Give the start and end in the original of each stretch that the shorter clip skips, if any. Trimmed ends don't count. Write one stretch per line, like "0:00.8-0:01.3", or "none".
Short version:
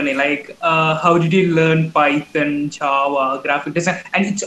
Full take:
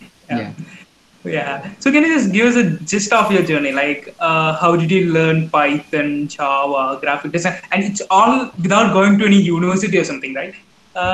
none